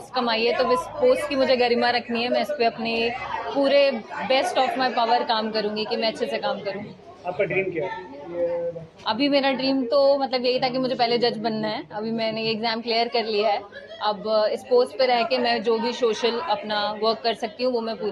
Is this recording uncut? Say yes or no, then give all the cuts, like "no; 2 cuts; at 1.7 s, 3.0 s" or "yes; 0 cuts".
yes; 0 cuts